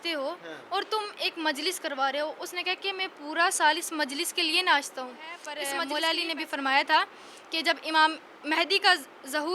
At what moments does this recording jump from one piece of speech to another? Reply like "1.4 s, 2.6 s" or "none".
5.5 s